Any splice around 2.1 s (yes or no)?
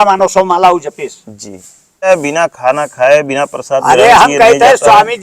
yes